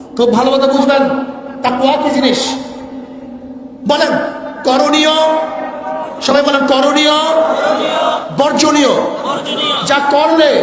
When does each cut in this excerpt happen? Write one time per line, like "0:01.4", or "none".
none